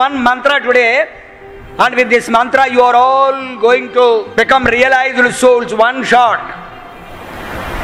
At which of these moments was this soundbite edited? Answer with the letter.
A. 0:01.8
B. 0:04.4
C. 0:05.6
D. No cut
B